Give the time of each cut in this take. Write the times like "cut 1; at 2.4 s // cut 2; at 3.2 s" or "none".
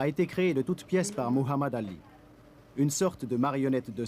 cut 1; at 1.9 s